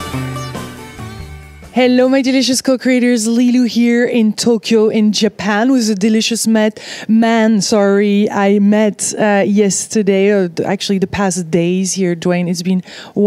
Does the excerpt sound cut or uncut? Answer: uncut